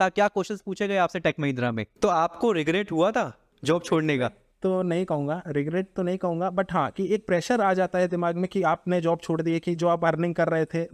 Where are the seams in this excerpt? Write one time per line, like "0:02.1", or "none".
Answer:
0:01.9
0:03.5